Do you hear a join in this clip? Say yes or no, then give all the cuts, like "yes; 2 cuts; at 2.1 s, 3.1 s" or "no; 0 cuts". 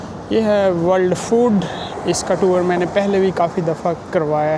no; 0 cuts